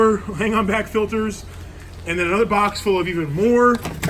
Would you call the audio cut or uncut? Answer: uncut